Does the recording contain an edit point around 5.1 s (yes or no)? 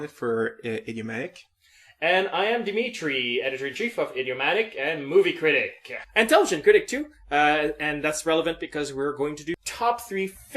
no